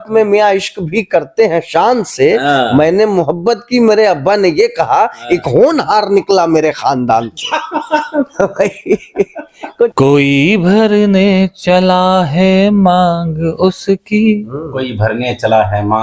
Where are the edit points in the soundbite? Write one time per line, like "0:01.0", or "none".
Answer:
0:09.9